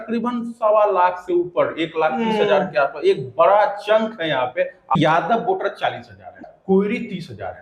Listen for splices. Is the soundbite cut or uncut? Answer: cut